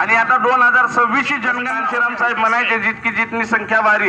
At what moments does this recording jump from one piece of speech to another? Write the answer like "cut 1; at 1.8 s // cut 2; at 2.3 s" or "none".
cut 1; at 1.8 s

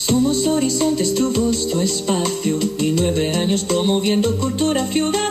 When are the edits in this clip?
cut 1; at 2.4 s

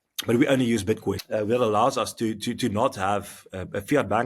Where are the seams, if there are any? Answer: cut 1; at 1.2 s

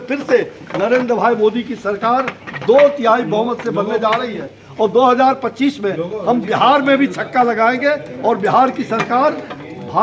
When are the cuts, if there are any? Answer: none

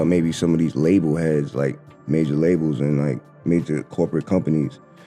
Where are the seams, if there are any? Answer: none

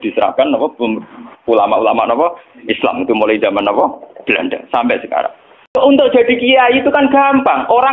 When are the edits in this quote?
cut 1; at 5.8 s

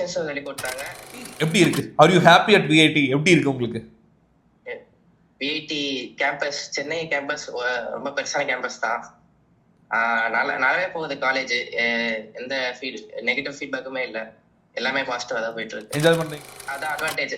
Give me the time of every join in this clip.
cut 1; at 1.3 s // cut 2; at 16.3 s

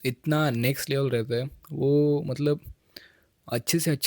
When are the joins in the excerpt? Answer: none

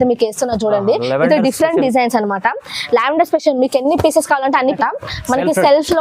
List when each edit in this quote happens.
cut 1; at 4.8 s

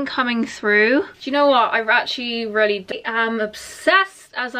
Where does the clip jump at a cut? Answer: cut 1; at 2.9 s

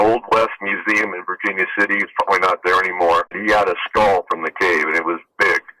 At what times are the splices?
cut 1; at 3.4 s

